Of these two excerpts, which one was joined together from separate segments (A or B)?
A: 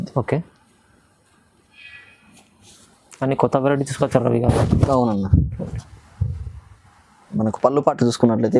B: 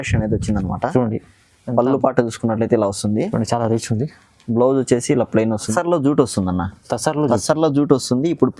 B